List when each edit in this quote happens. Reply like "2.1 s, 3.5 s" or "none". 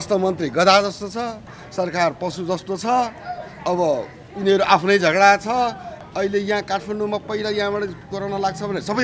1.6 s, 5.9 s